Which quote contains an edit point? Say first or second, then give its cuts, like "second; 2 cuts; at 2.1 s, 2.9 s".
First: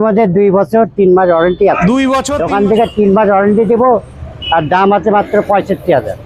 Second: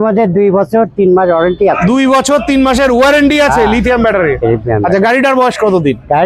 first; 1 cut; at 2.3 s